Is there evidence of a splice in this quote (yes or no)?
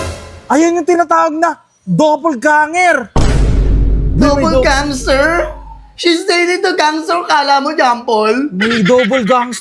no